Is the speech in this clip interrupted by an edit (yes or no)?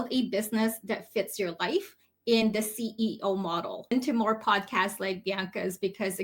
yes